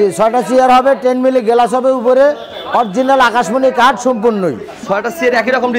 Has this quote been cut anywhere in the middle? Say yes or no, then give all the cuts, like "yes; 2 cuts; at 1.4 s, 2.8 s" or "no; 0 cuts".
no; 0 cuts